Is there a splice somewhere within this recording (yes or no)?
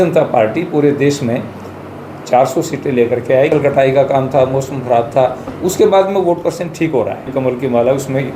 yes